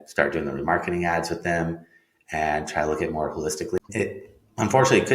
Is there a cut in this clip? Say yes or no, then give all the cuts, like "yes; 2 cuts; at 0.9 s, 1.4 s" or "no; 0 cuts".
yes; 1 cut; at 3.8 s